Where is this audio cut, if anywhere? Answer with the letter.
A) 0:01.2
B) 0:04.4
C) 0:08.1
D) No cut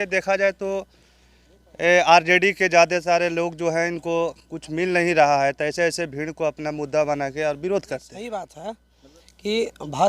C